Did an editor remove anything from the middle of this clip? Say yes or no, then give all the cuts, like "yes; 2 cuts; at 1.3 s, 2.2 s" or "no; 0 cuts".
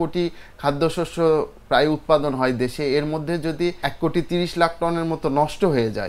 yes; 1 cut; at 3.8 s